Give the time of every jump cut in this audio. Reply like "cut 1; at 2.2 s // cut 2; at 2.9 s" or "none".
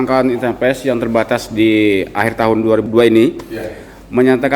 cut 1; at 2.8 s

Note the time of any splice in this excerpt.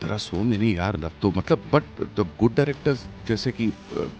none

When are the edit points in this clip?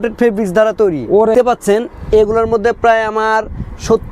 cut 1; at 1.3 s

